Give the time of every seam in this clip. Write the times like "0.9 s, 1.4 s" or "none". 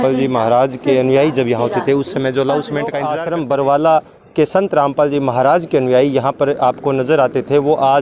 3.0 s